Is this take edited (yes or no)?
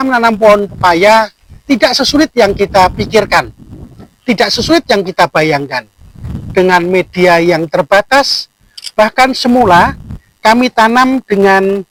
no